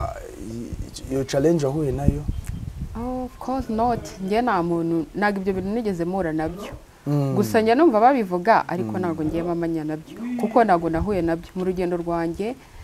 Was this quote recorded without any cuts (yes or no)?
yes